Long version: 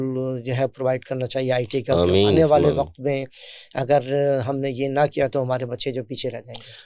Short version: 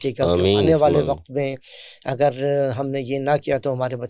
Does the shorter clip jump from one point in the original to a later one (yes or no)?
no